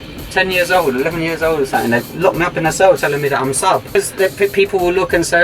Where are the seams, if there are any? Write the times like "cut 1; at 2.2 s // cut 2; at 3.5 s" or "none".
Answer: cut 1; at 3.9 s